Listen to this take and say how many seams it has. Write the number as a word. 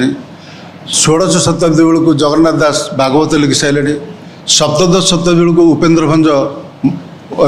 zero